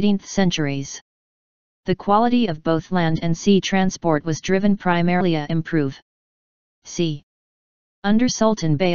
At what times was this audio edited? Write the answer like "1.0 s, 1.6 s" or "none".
none